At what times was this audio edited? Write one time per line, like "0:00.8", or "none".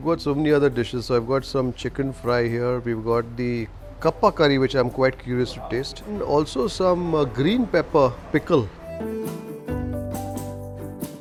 none